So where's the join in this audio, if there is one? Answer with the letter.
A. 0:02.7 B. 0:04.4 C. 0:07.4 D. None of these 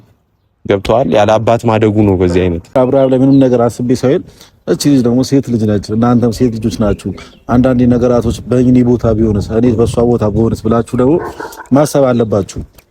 A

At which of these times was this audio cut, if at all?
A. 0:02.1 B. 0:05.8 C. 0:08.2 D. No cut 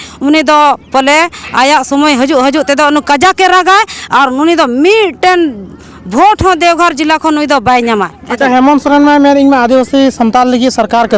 C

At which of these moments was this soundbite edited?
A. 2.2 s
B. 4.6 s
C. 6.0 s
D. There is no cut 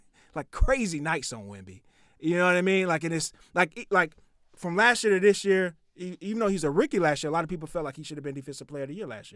D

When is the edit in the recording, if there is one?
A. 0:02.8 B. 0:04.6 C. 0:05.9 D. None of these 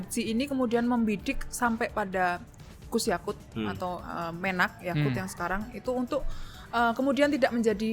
D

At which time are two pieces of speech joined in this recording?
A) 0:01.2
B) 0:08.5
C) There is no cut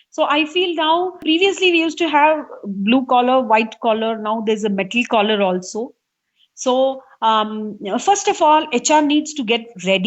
A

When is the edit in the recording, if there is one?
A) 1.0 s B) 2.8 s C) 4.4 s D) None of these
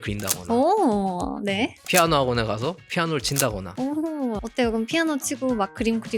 C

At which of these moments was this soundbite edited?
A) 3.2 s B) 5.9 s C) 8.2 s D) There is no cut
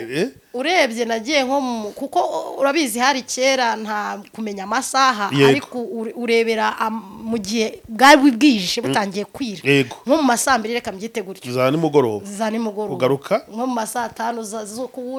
D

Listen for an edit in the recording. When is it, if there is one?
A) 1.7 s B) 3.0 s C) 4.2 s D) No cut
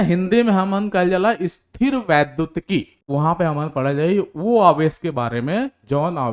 B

